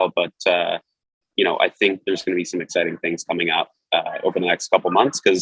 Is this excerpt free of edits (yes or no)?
yes